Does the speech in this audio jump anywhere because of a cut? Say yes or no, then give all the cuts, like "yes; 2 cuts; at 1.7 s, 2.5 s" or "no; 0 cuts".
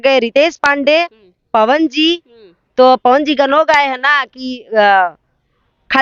no; 0 cuts